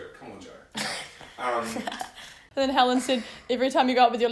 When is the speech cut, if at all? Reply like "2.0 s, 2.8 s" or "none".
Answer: 2.4 s